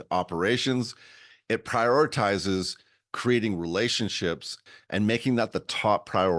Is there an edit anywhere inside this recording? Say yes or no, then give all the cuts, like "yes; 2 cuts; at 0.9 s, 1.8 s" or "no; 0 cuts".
yes; 1 cut; at 4.6 s